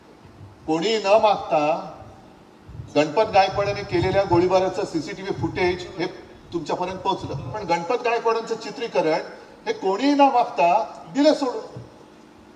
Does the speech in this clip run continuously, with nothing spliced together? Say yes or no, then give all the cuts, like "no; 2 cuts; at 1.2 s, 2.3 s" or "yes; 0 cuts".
no; 1 cut; at 7.6 s